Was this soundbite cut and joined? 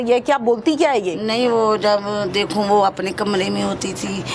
no; 0 cuts

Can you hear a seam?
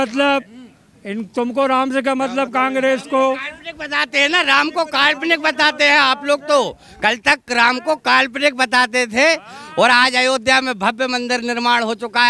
no; 0 cuts

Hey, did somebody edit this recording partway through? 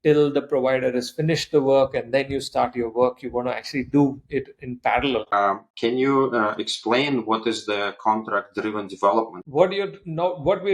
yes; 2 cuts; at 5.3 s, 9.4 s

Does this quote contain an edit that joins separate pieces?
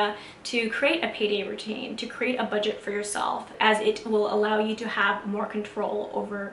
yes; 1 cut; at 3.5 s

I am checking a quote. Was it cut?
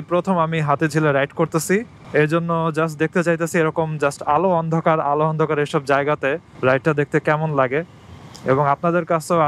no; 0 cuts

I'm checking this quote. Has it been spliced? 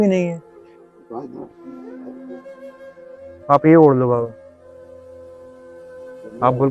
yes; 2 cuts; at 1.9 s, 3.5 s

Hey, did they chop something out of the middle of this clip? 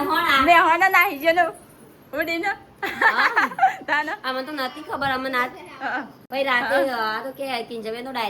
no; 0 cuts

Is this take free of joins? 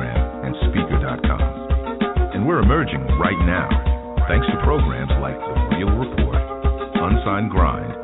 yes; 0 cuts

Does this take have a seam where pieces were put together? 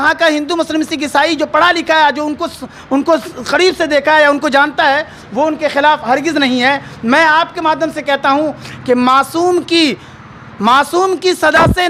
no; 0 cuts

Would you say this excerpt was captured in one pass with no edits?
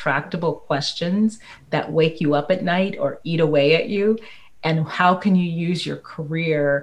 yes; 0 cuts

